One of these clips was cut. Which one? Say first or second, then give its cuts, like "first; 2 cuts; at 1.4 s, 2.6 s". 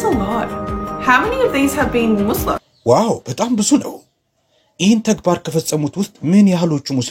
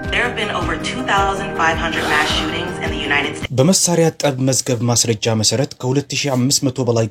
second; 1 cut; at 3.4 s